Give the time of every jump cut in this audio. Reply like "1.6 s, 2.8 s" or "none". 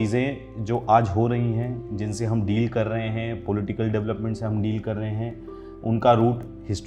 none